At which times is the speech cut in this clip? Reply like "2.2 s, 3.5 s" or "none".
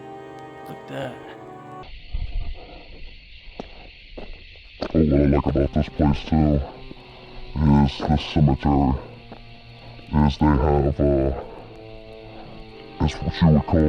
1.8 s